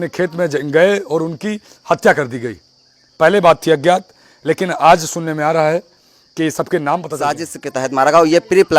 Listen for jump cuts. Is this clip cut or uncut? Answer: cut